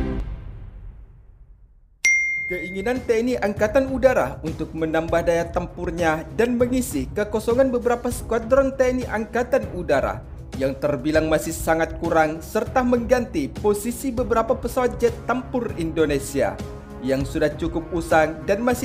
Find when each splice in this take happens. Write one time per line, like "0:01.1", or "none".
0:02.5